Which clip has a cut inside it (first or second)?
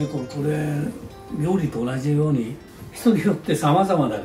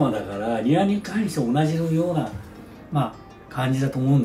first